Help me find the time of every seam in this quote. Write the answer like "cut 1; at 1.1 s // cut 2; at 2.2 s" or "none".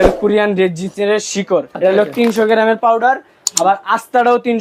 cut 1; at 1.7 s